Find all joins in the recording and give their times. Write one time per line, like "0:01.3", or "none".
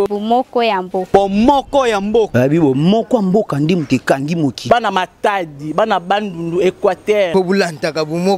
none